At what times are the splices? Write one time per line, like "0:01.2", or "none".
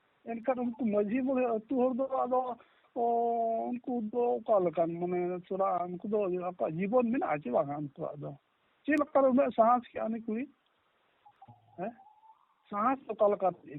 none